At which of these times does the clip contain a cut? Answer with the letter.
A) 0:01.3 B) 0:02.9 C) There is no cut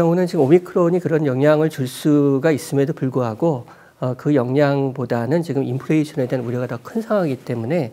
C